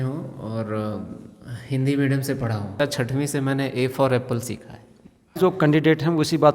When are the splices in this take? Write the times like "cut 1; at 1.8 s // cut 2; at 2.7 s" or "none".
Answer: cut 1; at 2.7 s // cut 2; at 5.4 s